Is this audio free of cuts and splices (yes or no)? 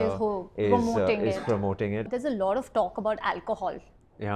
no